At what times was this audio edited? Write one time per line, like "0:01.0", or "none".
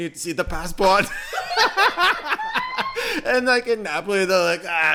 none